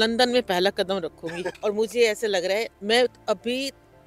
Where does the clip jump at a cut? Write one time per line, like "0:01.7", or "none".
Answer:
0:01.4